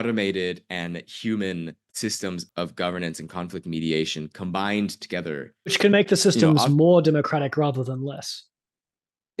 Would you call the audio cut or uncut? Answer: cut